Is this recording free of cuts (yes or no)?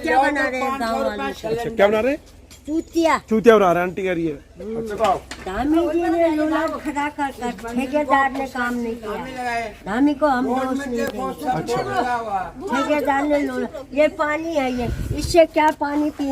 no